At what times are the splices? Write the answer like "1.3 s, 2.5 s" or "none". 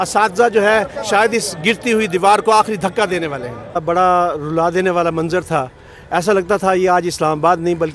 3.8 s

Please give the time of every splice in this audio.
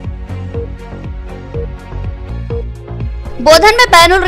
1.1 s

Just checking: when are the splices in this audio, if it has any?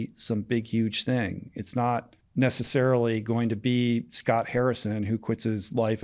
2.2 s

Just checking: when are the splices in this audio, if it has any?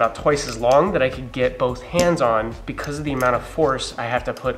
none

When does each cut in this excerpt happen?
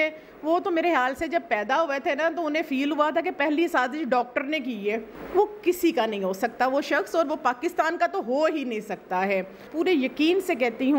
5.1 s, 9.6 s

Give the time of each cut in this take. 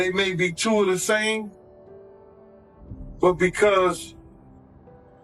1.5 s, 3.1 s

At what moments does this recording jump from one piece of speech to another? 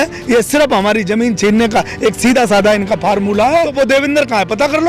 3.7 s

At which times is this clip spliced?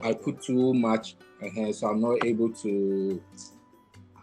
none

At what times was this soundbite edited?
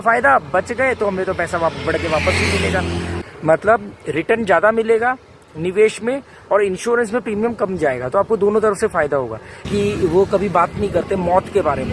3.1 s, 9.7 s

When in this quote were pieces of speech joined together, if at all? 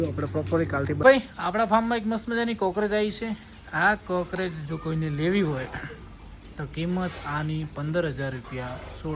1.0 s

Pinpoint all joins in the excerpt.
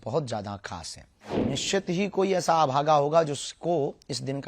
1.4 s

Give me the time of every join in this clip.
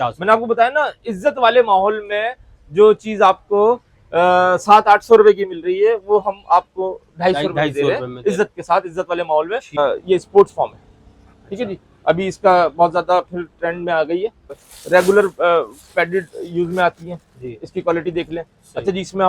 9.8 s, 14.6 s

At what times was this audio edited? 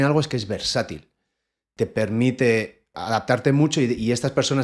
none

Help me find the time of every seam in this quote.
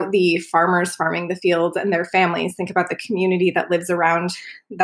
none

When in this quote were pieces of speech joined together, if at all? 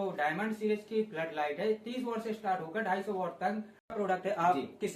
3.9 s

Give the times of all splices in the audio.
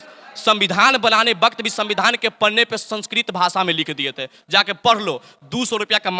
none

